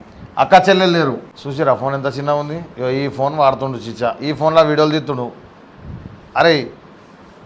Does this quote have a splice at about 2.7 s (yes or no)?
no